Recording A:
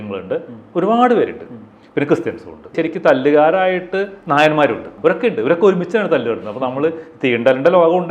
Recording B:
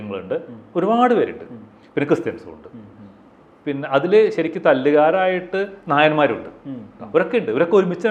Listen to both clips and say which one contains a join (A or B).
A